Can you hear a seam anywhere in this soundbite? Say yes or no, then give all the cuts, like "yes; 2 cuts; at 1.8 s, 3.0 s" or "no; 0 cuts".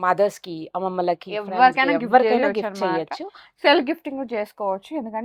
no; 0 cuts